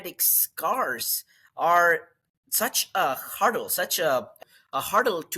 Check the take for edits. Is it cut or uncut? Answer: cut